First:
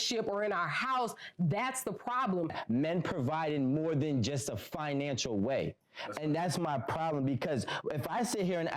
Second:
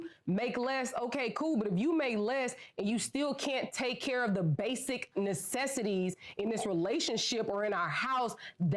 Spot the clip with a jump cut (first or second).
first